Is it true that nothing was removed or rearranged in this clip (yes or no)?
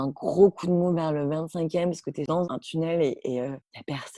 no